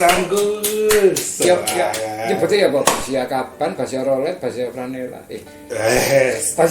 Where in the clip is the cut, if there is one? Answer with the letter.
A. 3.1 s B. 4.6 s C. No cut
C